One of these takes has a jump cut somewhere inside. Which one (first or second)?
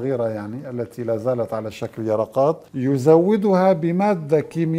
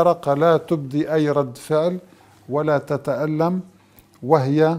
first